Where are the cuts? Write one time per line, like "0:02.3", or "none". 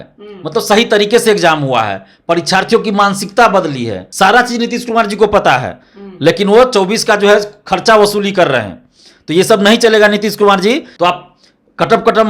0:04.0
0:10.9